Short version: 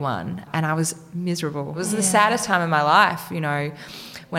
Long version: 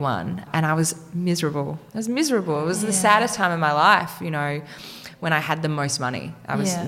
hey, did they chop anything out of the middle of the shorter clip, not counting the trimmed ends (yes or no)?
yes